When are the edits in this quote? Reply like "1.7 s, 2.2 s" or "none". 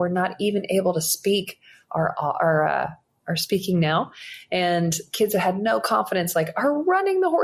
none